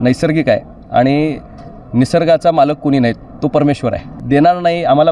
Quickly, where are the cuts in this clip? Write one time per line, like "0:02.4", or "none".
0:04.1